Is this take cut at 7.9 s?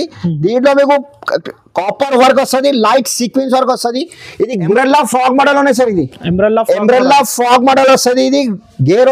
no; 1 cut; at 4.7 s

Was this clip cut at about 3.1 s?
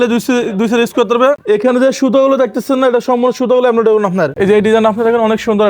no; 2 cuts; at 1.4 s, 4.3 s

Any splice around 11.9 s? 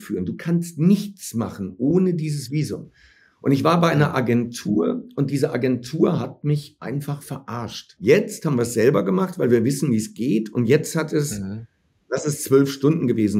no; 1 cut; at 7.9 s

